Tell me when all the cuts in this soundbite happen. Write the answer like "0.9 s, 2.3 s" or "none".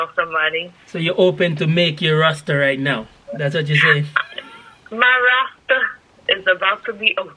none